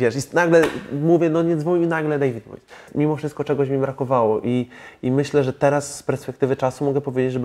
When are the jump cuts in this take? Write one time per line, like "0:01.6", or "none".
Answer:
0:02.9